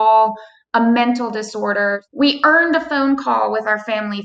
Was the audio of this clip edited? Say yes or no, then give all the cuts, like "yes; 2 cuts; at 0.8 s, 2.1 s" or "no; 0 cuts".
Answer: yes; 1 cut; at 2.0 s